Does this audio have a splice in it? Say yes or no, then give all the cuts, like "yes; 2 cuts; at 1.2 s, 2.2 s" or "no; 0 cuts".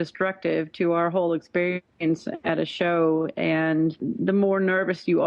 yes; 1 cut; at 4.0 s